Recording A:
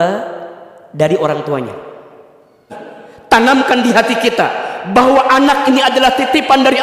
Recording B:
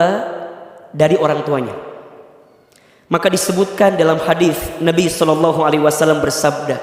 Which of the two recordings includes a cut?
A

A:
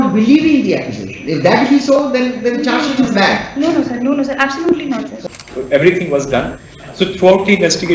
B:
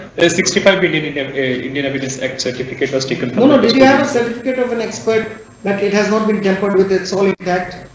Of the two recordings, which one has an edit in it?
A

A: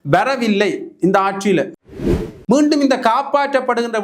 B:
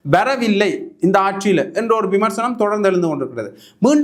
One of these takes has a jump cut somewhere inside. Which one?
A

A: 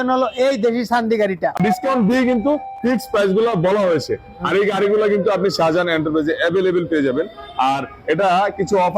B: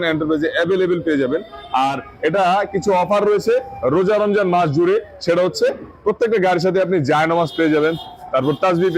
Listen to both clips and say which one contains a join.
A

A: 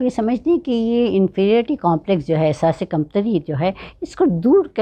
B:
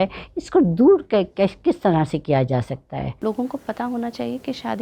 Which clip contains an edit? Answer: B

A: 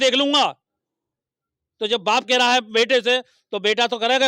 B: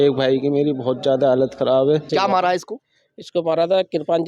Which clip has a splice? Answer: B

